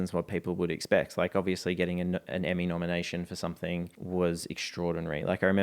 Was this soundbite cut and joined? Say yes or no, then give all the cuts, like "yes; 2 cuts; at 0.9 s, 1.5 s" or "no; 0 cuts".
yes; 1 cut; at 4.0 s